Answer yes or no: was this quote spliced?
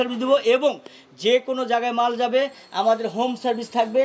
no